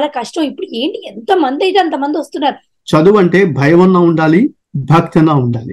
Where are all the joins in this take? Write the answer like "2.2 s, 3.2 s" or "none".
2.7 s